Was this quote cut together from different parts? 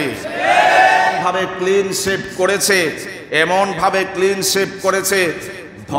yes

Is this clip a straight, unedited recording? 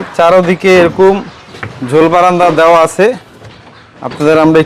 yes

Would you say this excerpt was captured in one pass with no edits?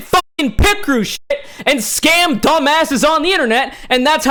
yes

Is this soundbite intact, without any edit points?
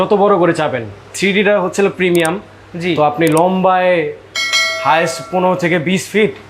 yes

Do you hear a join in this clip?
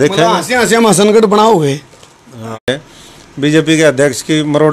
yes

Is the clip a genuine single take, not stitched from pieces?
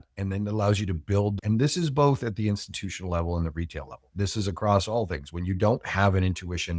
no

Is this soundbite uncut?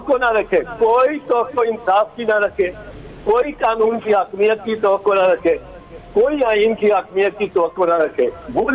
yes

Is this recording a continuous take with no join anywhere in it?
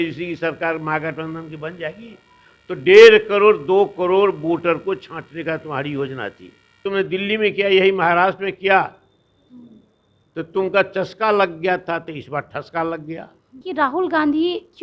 no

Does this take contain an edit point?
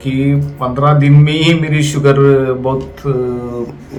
no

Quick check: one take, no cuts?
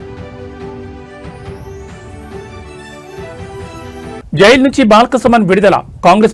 no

